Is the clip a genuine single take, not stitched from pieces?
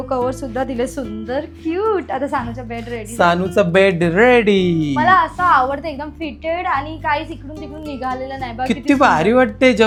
yes; 0 cuts

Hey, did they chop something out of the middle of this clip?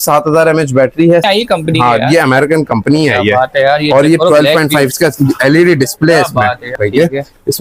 yes; 2 cuts; at 1.2 s, 6.8 s

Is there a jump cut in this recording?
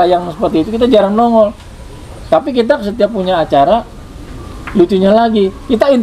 no; 0 cuts

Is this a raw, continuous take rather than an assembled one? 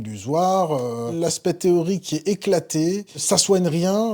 no; 2 cuts; at 1.1 s, 3.2 s

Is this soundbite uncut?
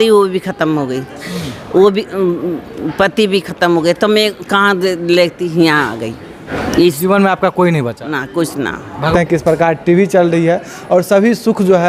no; 2 cuts; at 6.5 s, 9.1 s

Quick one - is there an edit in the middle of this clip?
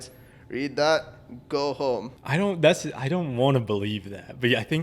yes; 1 cut; at 2.1 s

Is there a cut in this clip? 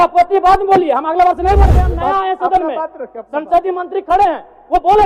yes; 1 cut; at 1.8 s

